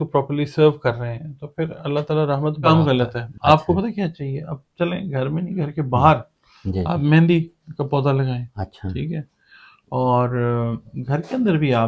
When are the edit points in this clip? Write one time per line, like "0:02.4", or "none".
0:02.7